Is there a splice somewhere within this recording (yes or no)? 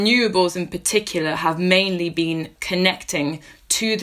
yes